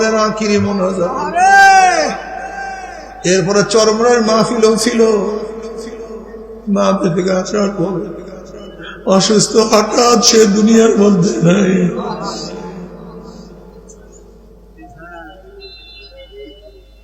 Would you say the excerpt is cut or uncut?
uncut